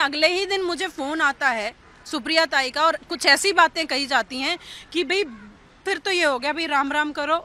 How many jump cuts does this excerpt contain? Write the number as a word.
zero